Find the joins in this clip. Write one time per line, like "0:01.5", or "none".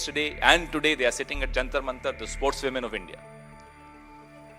0:03.2